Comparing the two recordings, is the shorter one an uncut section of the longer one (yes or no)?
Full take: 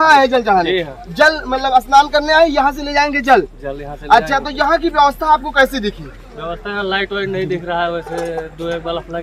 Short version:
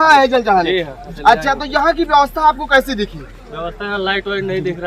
no